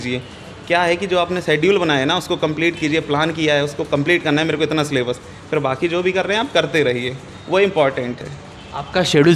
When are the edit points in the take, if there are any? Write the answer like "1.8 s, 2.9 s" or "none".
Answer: none